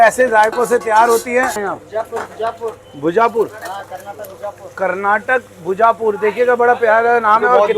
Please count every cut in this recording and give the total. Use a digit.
1